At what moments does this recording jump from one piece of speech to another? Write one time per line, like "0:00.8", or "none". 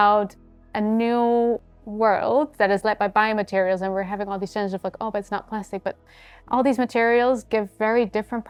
none